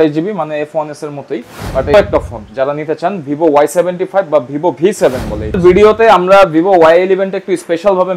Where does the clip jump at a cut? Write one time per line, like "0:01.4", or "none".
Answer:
0:01.9
0:05.6